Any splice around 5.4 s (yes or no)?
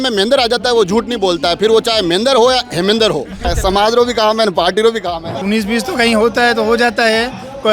yes